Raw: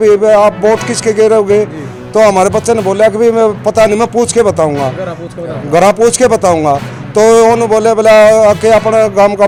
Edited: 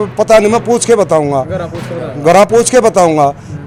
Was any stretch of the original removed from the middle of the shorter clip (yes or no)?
no